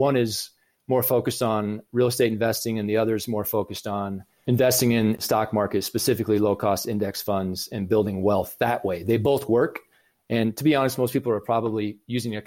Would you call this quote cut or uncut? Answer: uncut